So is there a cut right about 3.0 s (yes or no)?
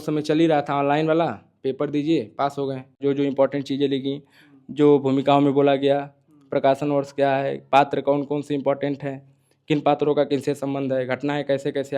yes